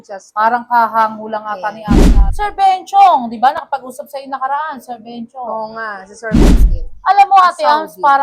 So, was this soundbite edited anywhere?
yes; 2 cuts; at 2.0 s, 6.5 s

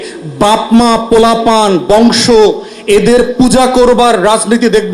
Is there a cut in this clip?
no; 0 cuts

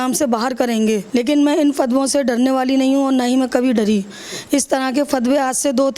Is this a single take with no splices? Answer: no; 1 cut; at 1.0 s

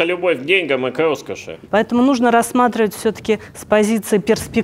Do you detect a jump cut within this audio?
yes; 1 cut; at 1.6 s

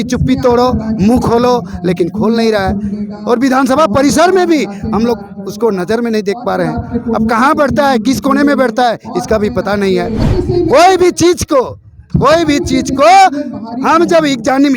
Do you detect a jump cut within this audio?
yes; 1 cut; at 10.2 s

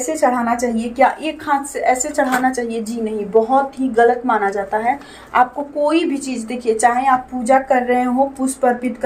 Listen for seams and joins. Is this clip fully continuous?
yes; 0 cuts

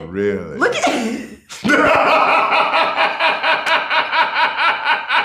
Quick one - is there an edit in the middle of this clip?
no; 0 cuts

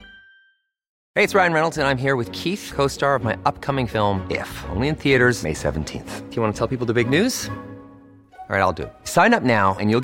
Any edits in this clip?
yes; 1 cut; at 1.0 s

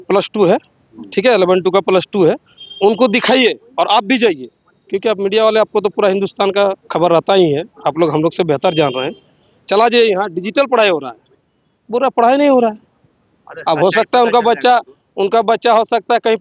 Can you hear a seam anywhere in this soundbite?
no; 0 cuts

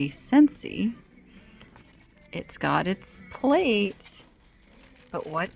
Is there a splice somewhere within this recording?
no; 0 cuts

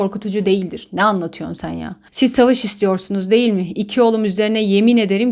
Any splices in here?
no; 0 cuts

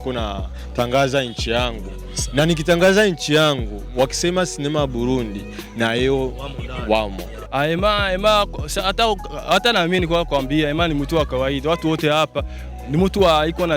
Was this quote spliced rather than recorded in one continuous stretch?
yes; 1 cut; at 7.3 s

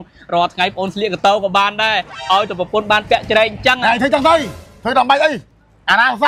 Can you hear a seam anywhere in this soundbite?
no; 0 cuts

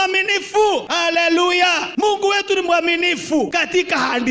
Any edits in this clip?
yes; 3 cuts; at 0.9 s, 1.9 s, 3.5 s

